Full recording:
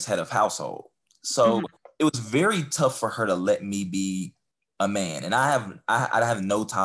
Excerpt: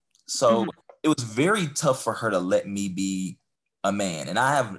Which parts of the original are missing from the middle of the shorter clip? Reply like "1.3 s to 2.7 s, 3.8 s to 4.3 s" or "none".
none